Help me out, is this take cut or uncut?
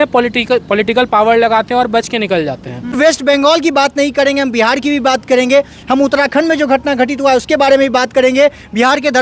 cut